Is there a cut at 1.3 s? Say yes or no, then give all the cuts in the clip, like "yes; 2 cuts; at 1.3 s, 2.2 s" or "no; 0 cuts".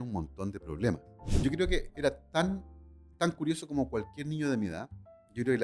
yes; 1 cut; at 1.3 s